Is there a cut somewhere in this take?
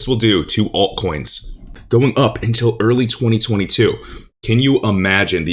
yes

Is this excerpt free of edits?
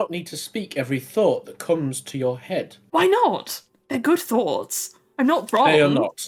yes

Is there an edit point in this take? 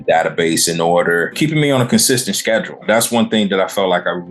yes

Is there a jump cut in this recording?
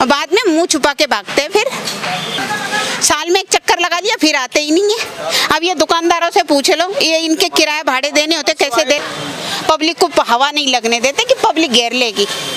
yes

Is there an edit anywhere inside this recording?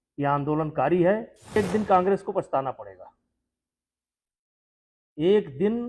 yes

